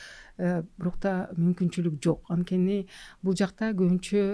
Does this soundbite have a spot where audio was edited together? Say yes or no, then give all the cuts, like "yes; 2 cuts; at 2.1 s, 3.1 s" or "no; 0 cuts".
no; 0 cuts